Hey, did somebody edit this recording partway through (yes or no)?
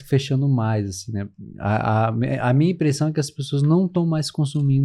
no